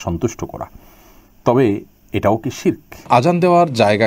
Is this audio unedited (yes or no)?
no